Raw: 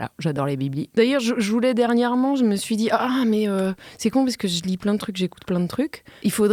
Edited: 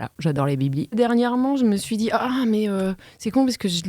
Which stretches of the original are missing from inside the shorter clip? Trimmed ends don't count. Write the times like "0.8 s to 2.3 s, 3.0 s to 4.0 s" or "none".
0.9 s to 1.7 s